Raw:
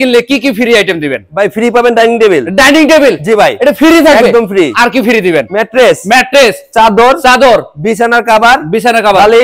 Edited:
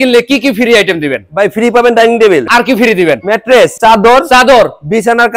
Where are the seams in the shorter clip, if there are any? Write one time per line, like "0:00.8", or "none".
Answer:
0:02.5
0:03.7